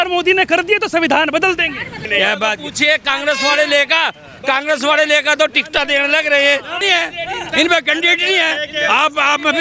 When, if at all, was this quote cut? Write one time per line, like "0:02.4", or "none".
0:02.1
0:06.7